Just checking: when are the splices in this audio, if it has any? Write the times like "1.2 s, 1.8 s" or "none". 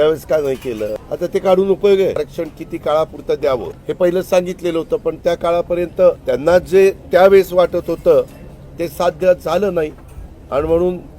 1.0 s, 2.2 s, 3.8 s, 6.2 s